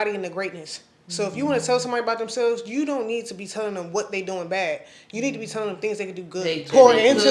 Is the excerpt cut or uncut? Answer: uncut